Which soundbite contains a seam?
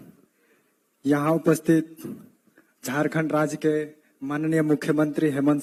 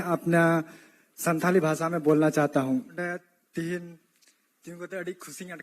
second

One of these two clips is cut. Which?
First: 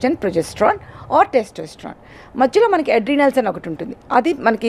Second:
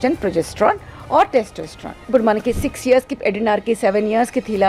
second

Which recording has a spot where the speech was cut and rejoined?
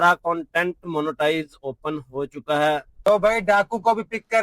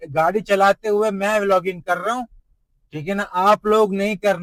first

